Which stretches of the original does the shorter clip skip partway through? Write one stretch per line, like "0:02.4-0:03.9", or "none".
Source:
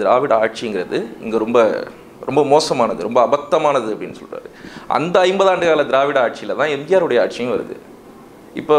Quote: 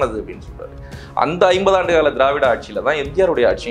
none